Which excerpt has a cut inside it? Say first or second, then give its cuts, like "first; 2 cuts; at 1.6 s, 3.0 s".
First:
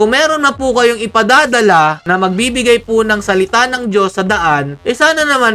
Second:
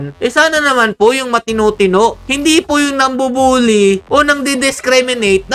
second; 1 cut; at 2.2 s